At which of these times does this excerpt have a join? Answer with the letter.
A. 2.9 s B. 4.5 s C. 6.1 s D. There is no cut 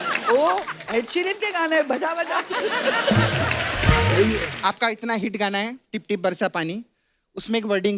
B